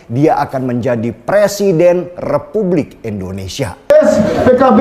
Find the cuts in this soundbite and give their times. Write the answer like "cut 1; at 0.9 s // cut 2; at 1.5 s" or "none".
cut 1; at 3.9 s

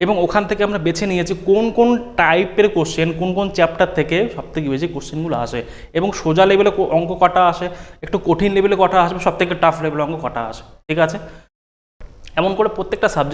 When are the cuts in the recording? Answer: none

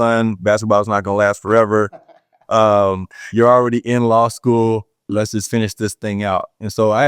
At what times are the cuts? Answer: none

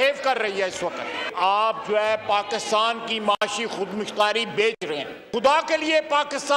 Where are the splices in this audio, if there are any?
cut 1; at 1.2 s // cut 2; at 5.2 s

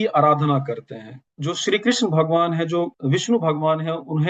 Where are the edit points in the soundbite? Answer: cut 1; at 1.2 s // cut 2; at 3.0 s

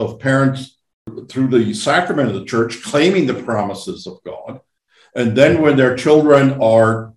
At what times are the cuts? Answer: cut 1; at 1.2 s

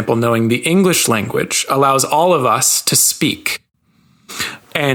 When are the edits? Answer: none

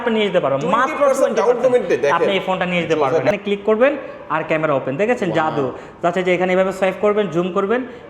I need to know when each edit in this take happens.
cut 1; at 3.3 s

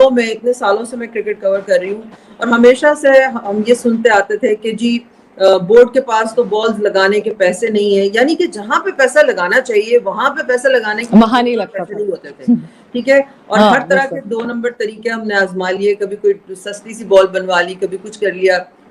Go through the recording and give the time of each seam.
none

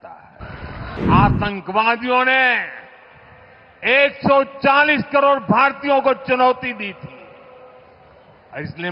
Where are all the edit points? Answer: cut 1; at 1.0 s

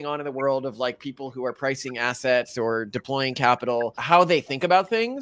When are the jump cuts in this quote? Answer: cut 1; at 4.0 s

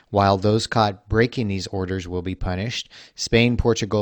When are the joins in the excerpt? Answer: none

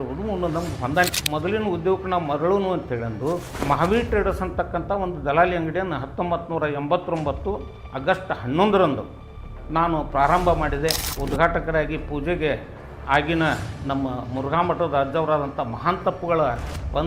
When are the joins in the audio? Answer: cut 1; at 1.1 s // cut 2; at 3.5 s // cut 3; at 11.1 s

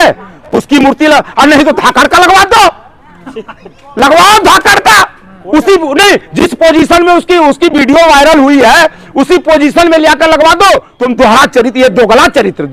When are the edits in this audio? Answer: cut 1; at 10.9 s

